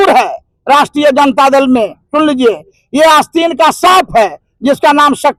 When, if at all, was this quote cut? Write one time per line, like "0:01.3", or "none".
none